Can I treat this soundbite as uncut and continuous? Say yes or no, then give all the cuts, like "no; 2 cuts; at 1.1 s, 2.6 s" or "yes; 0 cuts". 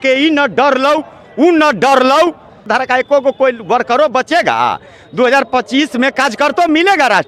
no; 1 cut; at 2.6 s